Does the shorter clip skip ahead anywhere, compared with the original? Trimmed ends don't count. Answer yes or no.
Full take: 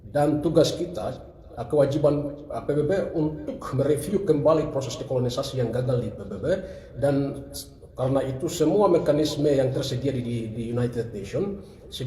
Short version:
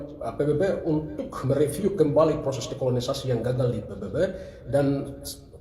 no